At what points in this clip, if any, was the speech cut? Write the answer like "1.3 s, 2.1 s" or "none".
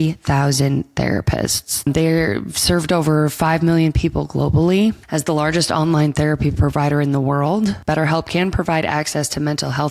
1.7 s, 5.0 s